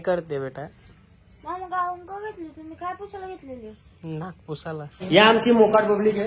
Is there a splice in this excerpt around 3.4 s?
no; 1 cut; at 5.0 s

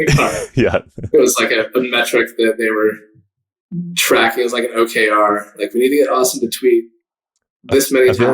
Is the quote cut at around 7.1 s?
no; 0 cuts

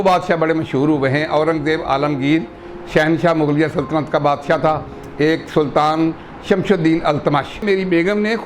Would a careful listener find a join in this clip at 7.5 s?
yes; 1 cut; at 7.5 s

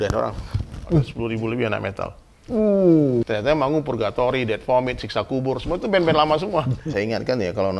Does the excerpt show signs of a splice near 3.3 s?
yes; 3 cuts; at 1.1 s, 3.3 s, 6.8 s

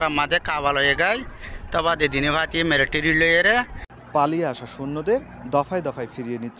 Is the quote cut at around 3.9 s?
yes; 1 cut; at 3.9 s

